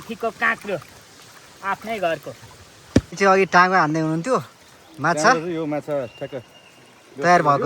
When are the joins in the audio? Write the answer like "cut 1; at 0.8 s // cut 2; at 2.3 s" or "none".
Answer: cut 1; at 3.1 s